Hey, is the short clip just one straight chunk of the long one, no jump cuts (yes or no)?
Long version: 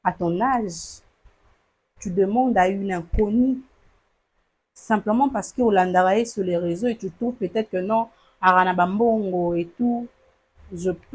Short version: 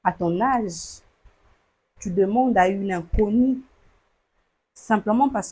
yes